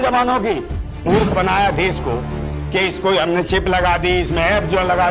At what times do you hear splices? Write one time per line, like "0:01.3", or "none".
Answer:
0:01.0